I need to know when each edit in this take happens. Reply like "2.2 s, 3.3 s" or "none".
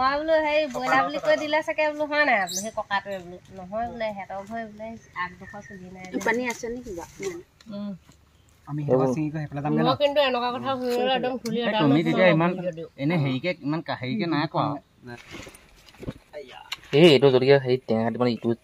7.5 s, 15.6 s